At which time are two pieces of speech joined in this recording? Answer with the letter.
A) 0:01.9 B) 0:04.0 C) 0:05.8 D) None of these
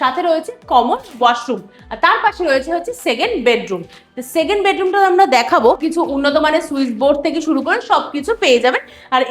C